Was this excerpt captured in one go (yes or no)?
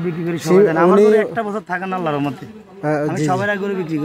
yes